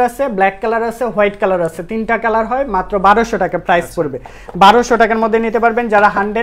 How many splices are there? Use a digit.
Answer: 0